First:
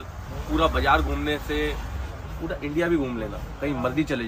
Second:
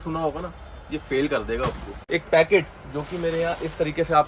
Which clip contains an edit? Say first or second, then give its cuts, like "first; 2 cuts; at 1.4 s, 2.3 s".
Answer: second; 1 cut; at 1.9 s